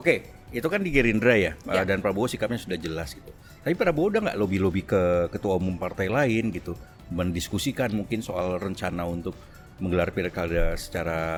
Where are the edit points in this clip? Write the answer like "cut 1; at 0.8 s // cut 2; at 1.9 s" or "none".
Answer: none